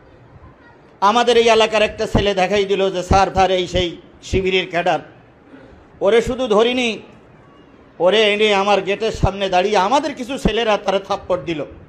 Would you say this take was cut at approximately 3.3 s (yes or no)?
yes